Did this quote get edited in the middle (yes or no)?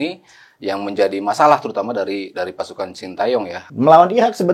yes